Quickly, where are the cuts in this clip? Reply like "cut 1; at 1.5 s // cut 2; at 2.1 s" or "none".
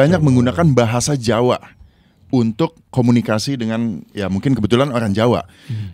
none